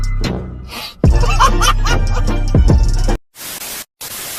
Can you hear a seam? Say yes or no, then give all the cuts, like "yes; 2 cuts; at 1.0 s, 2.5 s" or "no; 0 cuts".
no; 0 cuts